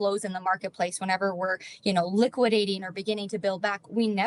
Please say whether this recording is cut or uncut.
uncut